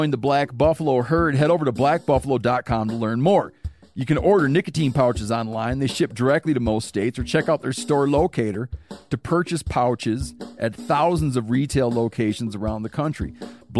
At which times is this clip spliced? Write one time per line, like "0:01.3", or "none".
none